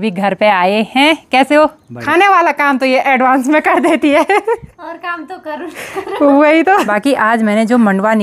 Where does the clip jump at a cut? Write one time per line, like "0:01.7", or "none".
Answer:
0:01.9
0:06.9